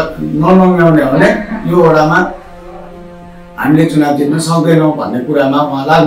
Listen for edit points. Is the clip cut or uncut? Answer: uncut